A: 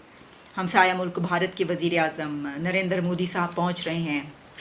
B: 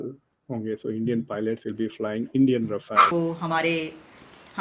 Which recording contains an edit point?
B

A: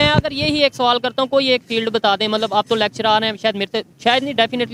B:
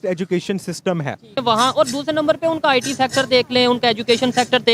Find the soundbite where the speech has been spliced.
B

